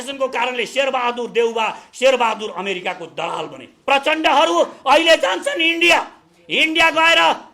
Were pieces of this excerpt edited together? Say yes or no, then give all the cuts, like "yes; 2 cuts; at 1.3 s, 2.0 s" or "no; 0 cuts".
yes; 1 cut; at 3.6 s